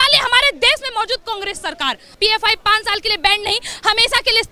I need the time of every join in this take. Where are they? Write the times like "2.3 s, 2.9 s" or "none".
2.2 s